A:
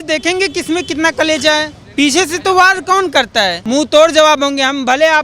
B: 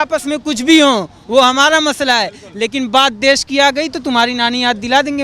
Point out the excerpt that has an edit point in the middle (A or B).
A